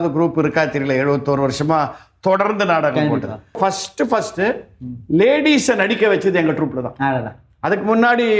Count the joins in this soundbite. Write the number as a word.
one